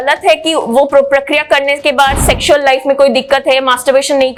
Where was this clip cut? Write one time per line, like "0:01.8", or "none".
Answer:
none